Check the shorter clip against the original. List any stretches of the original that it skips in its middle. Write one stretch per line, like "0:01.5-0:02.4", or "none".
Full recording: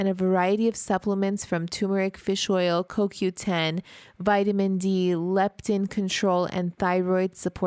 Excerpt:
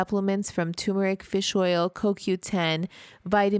none